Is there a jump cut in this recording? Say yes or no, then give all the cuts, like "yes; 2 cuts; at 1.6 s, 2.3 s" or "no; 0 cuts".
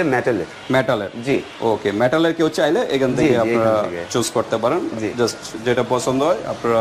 no; 0 cuts